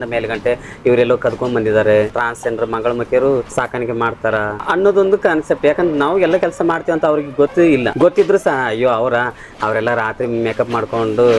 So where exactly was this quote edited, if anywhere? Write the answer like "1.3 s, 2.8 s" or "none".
2.2 s, 3.5 s, 4.6 s, 7.8 s